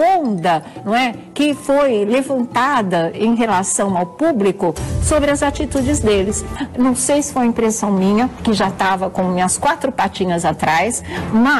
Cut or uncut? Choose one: cut